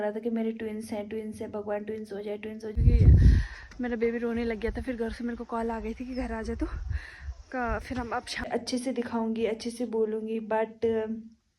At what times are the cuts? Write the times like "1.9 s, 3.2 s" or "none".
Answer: 2.7 s, 8.5 s